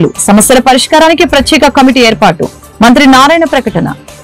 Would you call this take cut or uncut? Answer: uncut